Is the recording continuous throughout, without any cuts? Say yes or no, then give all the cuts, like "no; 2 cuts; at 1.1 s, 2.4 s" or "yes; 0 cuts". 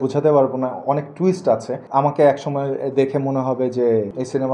yes; 0 cuts